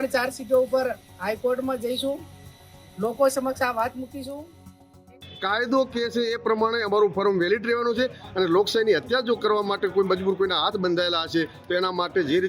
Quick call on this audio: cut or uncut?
cut